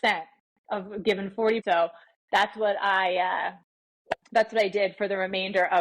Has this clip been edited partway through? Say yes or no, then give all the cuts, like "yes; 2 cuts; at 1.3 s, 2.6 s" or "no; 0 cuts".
yes; 1 cut; at 1.6 s